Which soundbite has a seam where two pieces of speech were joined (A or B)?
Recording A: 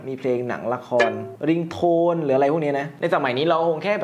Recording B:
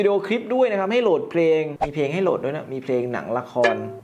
B